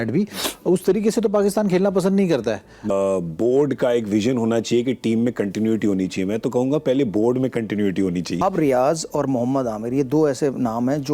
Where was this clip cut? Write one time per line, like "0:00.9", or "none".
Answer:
0:02.9
0:08.4